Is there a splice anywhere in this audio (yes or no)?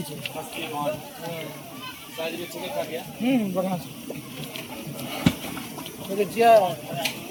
no